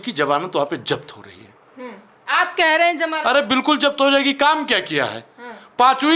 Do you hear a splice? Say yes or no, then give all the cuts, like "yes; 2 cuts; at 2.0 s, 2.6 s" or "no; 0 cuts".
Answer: no; 0 cuts